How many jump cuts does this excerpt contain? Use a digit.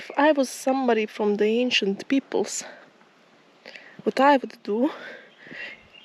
0